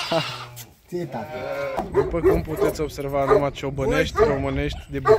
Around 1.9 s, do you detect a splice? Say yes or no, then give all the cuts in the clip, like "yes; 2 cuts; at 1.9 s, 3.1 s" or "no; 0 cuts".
yes; 1 cut; at 1.9 s